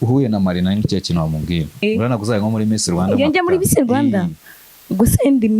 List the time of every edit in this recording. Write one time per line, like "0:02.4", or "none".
0:01.8